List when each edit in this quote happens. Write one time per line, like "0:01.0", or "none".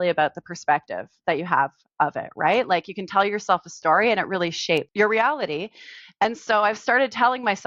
none